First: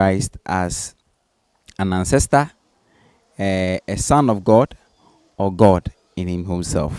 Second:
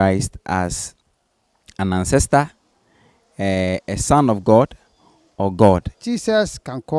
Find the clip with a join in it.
second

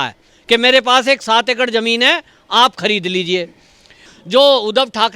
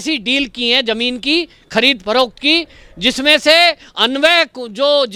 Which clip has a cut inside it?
first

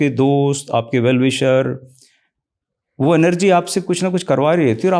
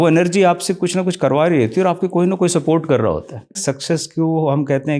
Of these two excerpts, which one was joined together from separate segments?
second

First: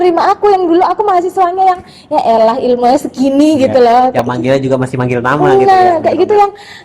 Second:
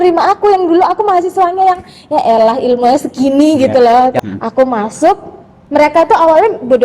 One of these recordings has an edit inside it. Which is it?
second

